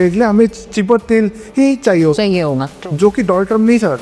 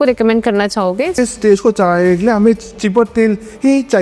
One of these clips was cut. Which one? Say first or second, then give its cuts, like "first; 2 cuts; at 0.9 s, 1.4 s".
second; 1 cut; at 1.1 s